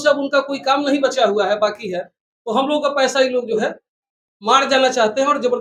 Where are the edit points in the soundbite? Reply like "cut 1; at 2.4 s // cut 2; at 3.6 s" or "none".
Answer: none